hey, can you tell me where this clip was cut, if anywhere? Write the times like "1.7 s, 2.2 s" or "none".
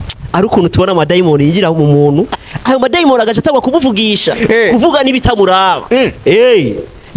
none